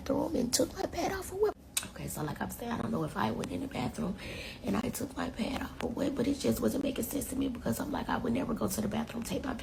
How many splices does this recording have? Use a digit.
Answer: 0